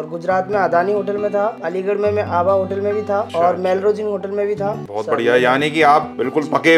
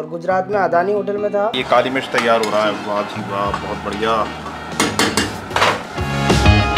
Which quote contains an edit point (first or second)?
second